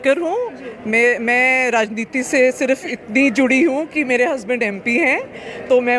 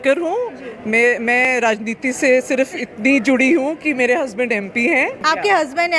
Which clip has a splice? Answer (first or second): second